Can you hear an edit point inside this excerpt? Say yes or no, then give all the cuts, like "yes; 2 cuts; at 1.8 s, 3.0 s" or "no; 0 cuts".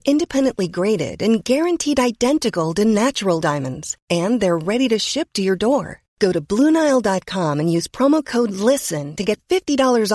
no; 0 cuts